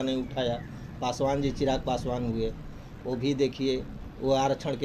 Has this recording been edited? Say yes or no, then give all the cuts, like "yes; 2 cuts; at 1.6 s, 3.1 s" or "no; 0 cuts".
no; 0 cuts